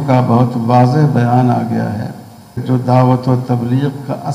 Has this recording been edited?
yes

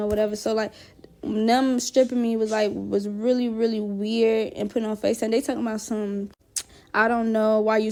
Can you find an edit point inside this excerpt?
no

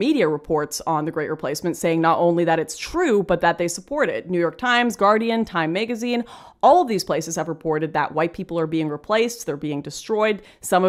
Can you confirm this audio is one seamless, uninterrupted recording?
yes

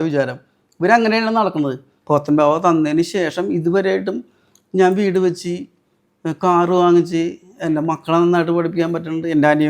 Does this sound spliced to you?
yes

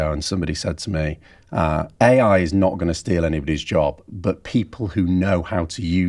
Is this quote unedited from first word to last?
yes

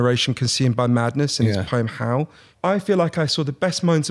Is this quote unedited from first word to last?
no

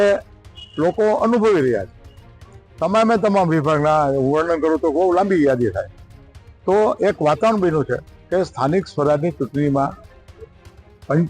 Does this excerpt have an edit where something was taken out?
no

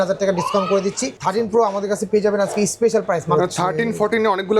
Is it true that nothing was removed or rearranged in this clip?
no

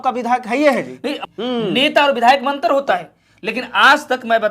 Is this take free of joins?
no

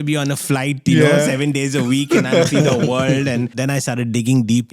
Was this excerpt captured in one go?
no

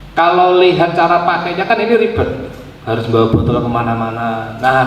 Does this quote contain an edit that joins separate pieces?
no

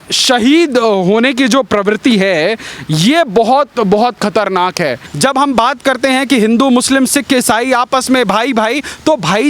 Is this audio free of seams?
no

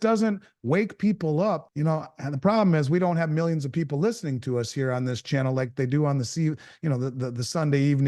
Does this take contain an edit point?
yes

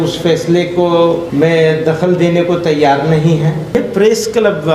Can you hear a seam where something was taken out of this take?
yes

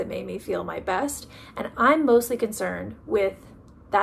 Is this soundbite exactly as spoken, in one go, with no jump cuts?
yes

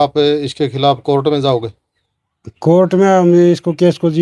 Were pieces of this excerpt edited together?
no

